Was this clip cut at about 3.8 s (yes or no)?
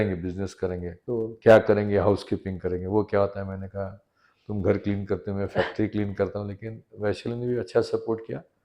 no